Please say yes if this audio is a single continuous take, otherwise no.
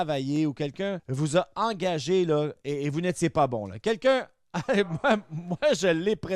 no